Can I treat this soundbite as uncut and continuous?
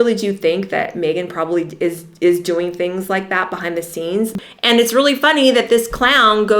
no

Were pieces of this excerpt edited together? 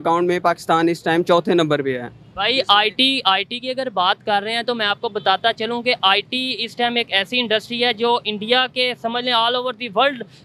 no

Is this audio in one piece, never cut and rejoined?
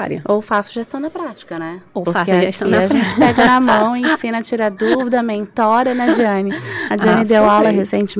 yes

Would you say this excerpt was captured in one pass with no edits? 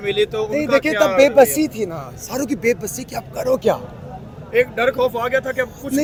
yes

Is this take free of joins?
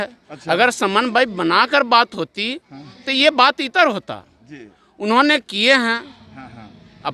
yes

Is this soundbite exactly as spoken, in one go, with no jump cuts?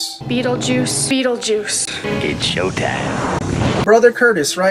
no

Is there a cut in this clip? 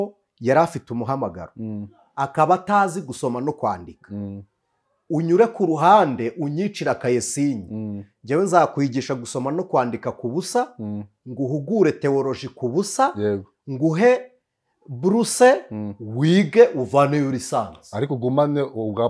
no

